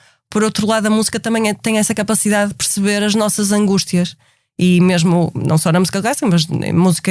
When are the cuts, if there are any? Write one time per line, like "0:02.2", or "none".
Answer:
none